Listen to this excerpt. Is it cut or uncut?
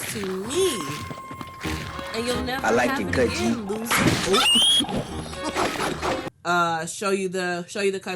cut